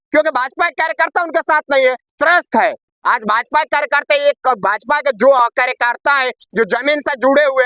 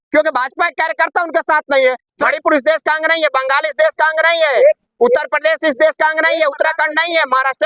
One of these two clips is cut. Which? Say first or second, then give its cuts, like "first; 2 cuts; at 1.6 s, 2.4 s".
second; 1 cut; at 2.1 s